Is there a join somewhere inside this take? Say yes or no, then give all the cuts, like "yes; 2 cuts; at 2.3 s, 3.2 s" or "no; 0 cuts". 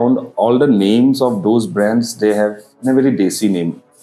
no; 0 cuts